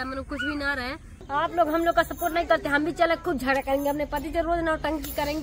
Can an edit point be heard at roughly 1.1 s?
yes; 1 cut; at 1.1 s

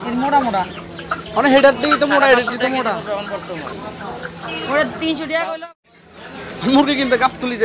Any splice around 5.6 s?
yes; 1 cut; at 5.6 s

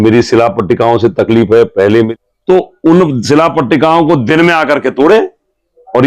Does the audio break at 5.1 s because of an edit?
no; 1 cut; at 2.1 s

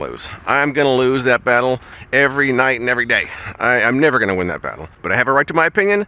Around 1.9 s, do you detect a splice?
no; 0 cuts

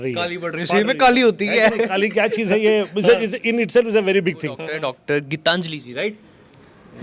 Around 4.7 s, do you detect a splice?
yes; 1 cut; at 4.7 s

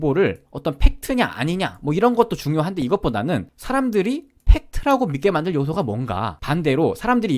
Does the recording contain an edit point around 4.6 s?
no; 0 cuts

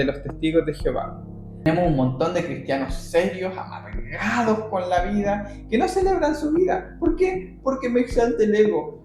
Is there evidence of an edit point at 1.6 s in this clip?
yes; 1 cut; at 1.6 s

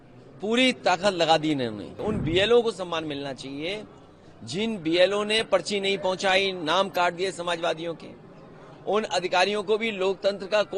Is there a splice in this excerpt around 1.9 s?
yes; 1 cut; at 1.9 s

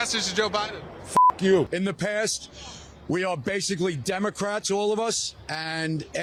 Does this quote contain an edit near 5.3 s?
no; 0 cuts

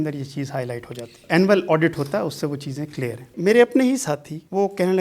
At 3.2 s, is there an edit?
yes; 1 cut; at 3.2 s

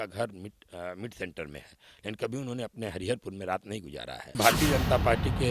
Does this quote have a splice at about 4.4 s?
yes; 1 cut; at 4.4 s

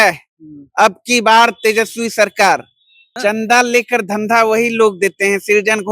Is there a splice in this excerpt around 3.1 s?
yes; 1 cut; at 3.1 s

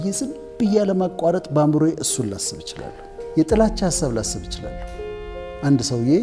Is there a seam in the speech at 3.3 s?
yes; 1 cut; at 3.3 s

